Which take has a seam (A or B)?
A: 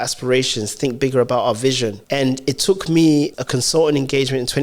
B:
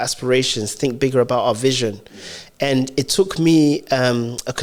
A